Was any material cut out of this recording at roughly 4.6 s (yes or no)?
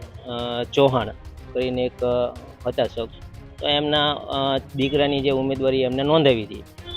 no